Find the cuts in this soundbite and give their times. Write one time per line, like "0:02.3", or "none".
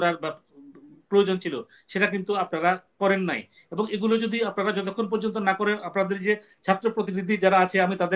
none